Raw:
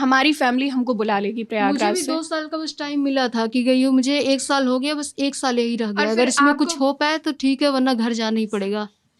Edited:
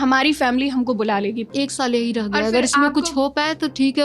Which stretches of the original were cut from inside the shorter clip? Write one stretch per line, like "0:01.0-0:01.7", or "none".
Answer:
0:01.5-0:05.1